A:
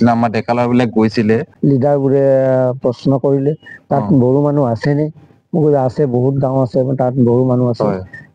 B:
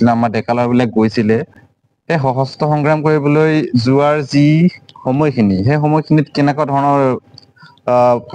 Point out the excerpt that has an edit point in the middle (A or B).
A